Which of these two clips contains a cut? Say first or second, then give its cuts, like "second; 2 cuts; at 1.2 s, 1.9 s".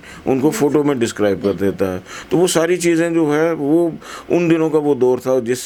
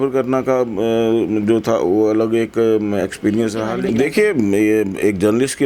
second; 1 cut; at 3.8 s